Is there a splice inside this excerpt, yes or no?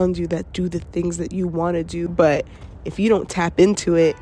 yes